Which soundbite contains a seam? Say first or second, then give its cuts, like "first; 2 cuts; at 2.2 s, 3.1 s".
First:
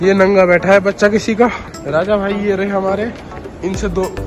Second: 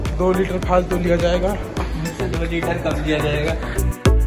first; 1 cut; at 1.7 s